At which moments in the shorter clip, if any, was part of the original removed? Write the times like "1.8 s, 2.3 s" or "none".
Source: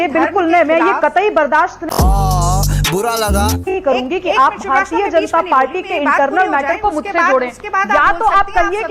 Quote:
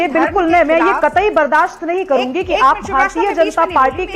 1.9 s